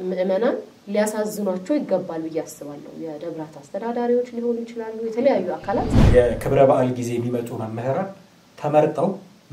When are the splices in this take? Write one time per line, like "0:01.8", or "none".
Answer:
0:06.0